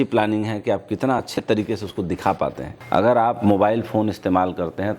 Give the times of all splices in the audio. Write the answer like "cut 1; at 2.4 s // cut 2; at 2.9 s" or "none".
cut 1; at 2.7 s